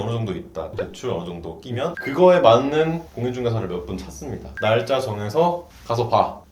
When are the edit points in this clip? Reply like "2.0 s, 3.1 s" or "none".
2.0 s, 4.5 s